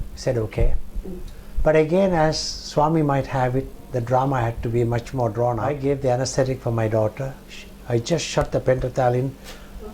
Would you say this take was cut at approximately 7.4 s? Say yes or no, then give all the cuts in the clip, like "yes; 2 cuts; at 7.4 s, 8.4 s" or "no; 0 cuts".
no; 1 cut; at 5.6 s